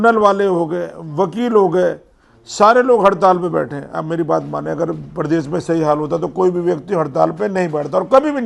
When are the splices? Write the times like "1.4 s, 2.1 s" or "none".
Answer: none